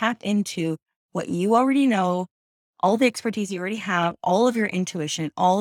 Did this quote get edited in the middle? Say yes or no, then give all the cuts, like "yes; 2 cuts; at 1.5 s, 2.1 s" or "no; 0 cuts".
no; 0 cuts